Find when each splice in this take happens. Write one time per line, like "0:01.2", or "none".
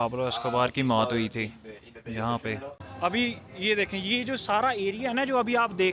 0:02.8